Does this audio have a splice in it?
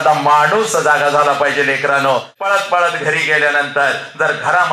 yes; 1 cut; at 2.3 s

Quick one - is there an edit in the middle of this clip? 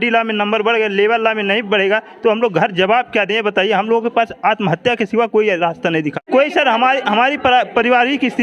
yes; 1 cut; at 6.2 s

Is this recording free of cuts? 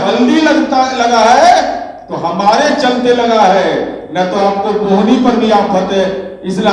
yes; 0 cuts

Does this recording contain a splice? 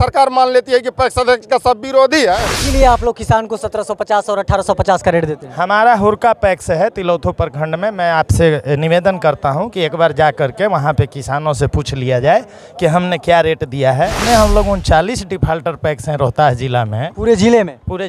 yes; 2 cuts; at 2.5 s, 14.2 s

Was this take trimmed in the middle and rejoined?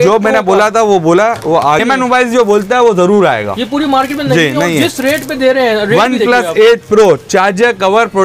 yes; 1 cut; at 1.8 s

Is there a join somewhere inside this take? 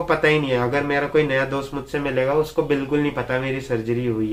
no; 0 cuts

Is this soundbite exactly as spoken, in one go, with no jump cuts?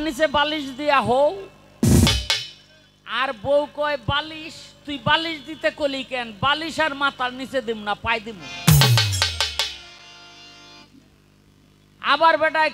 yes; 0 cuts

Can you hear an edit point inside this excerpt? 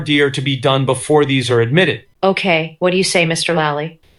no; 0 cuts

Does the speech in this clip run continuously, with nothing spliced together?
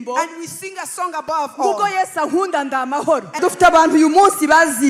no; 1 cut; at 3.4 s

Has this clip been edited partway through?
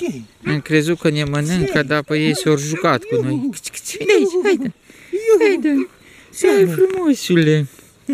no; 0 cuts

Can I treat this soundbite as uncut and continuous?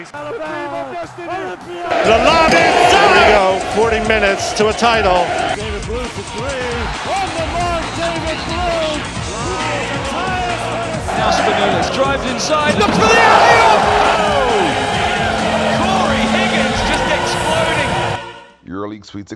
yes; 0 cuts

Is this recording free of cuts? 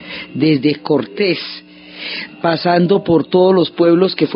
yes; 0 cuts

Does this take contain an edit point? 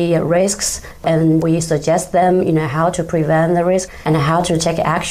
yes; 1 cut; at 3.9 s

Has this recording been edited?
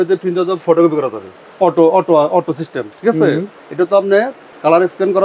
yes; 2 cuts; at 1.4 s, 3.6 s

